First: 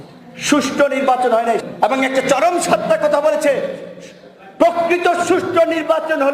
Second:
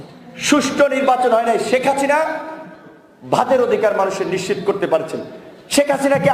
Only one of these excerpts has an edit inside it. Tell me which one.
first; 1 cut; at 1.6 s

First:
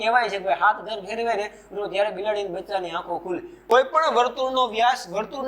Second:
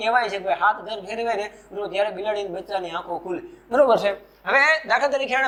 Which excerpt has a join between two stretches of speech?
first; 1 cut; at 3.6 s

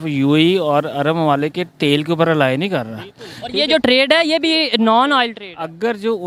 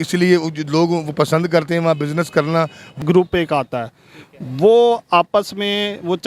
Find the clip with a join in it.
second; 1 cut; at 3.0 s

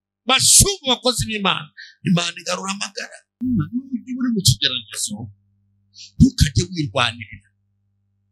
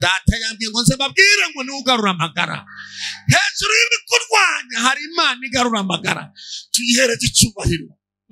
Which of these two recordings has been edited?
first; 1 cut; at 3.4 s

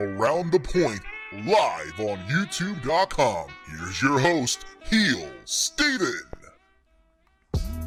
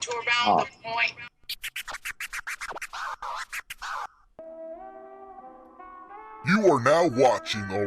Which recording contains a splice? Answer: second; 1 cut; at 1.2 s

